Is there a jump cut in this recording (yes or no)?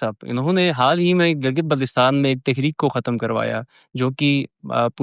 no